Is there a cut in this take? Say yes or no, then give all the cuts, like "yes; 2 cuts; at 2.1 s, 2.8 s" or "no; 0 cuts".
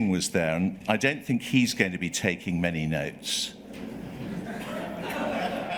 no; 0 cuts